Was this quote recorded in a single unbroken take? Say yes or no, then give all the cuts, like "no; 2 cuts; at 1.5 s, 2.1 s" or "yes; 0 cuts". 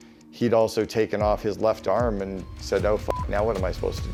yes; 0 cuts